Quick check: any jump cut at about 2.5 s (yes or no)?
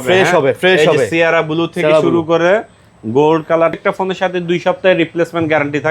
no